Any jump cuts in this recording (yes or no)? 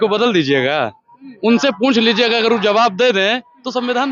no